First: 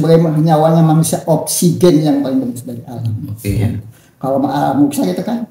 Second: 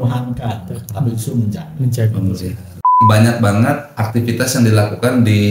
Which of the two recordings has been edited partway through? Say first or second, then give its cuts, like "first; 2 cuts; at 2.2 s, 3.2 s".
second; 1 cut; at 3.0 s